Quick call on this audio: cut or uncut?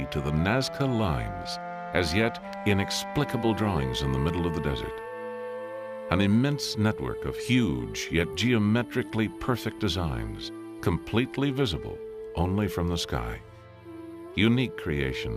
cut